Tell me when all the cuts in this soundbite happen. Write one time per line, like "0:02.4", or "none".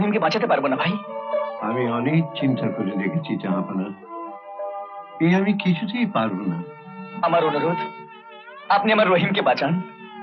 none